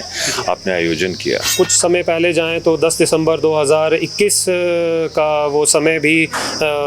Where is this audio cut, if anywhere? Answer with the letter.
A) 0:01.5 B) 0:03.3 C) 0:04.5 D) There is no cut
A